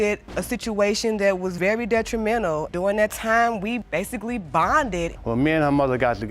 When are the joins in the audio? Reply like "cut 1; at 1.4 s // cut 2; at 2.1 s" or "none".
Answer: cut 1; at 5.1 s